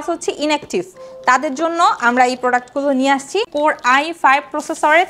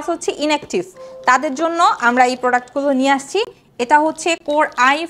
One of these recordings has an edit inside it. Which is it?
first; 1 cut; at 3.5 s

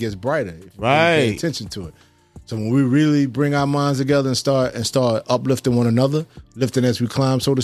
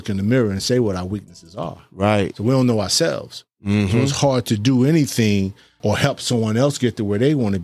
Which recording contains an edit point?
second; 1 cut; at 5.7 s

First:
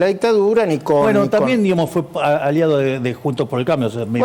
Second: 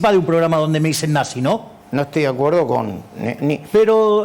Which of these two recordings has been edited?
second; 1 cut; at 1.8 s

